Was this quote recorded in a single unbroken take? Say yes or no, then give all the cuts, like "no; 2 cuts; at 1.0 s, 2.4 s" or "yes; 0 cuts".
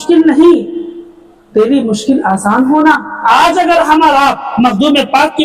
no; 1 cut; at 3.1 s